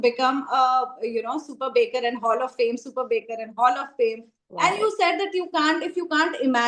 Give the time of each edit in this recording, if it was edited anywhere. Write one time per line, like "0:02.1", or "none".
none